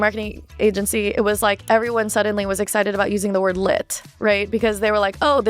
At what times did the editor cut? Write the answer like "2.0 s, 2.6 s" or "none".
none